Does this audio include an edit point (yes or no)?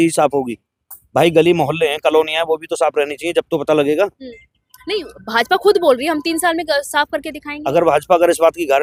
no